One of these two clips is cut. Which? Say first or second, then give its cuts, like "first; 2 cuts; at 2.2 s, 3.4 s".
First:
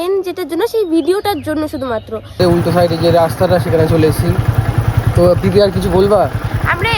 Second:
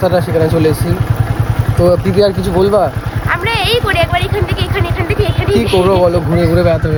first; 1 cut; at 2.4 s